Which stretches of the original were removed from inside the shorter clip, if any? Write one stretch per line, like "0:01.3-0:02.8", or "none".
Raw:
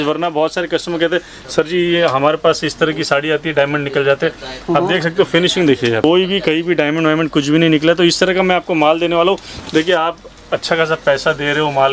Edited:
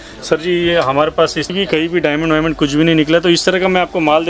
0:02.8-0:06.3